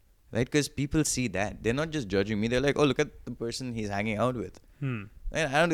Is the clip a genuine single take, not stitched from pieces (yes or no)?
yes